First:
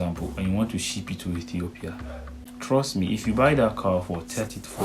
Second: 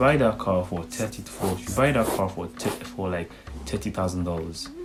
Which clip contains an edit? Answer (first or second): first